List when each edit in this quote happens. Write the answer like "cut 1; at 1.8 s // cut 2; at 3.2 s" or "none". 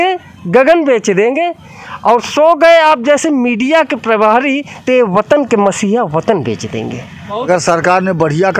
cut 1; at 7.5 s

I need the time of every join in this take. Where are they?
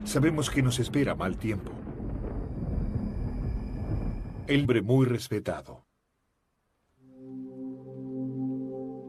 none

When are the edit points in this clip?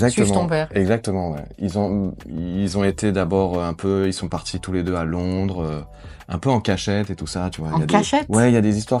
none

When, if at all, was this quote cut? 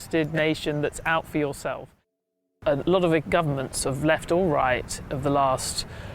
cut 1; at 2.1 s

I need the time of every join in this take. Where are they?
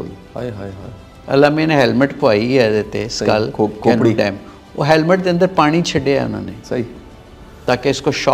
cut 1; at 1.1 s

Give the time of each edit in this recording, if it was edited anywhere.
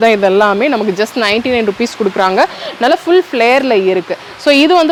none

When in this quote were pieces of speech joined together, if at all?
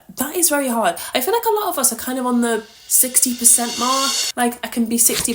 none

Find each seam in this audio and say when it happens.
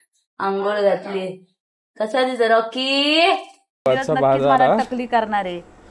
cut 1; at 3.9 s

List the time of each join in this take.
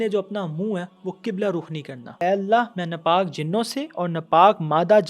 cut 1; at 2.2 s

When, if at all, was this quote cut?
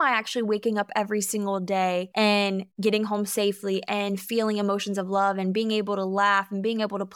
cut 1; at 2.4 s

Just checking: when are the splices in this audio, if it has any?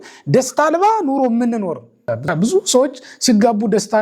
cut 1; at 2.2 s

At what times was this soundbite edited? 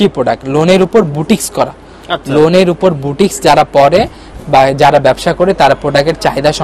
none

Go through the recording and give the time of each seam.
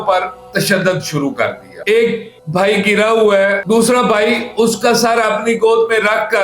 cut 1; at 1.7 s

